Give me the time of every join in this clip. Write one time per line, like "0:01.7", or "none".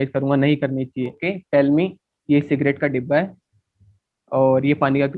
0:01.2